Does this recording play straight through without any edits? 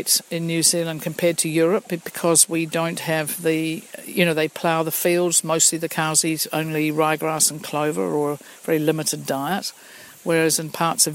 yes; 0 cuts

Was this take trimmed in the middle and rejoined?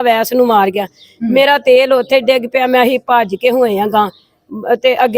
no; 0 cuts

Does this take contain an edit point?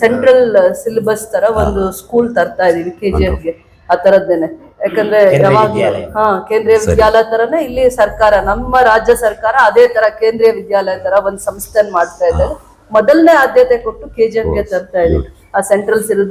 no; 0 cuts

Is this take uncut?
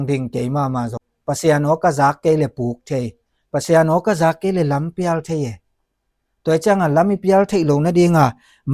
no; 1 cut; at 1.0 s

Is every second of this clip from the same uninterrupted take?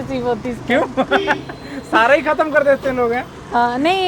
yes; 0 cuts

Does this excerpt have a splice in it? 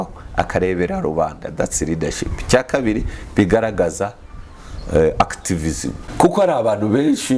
yes; 1 cut; at 6.0 s

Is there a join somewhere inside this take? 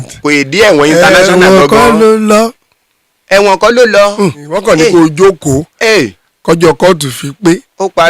yes; 1 cut; at 4.5 s

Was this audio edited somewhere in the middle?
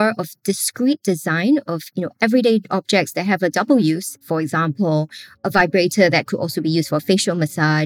yes; 1 cut; at 4.2 s

